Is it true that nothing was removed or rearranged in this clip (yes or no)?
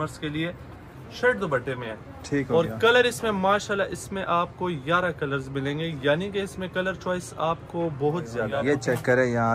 no